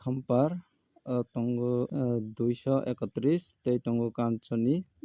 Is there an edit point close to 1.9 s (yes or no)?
yes